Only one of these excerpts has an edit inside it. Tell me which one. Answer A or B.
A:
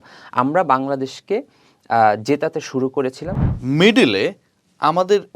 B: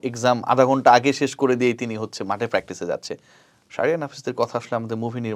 A